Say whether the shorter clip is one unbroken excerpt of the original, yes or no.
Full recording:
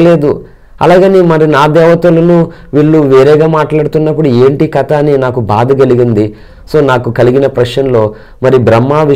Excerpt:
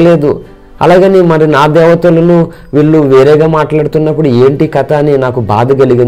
yes